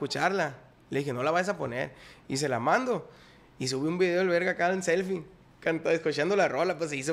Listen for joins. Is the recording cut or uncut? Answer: uncut